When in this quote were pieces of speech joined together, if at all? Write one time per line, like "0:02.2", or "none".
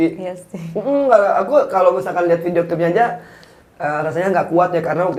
none